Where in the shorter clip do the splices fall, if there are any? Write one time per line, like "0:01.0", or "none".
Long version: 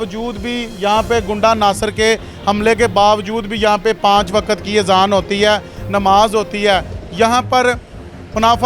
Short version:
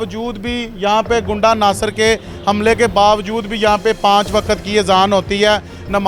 none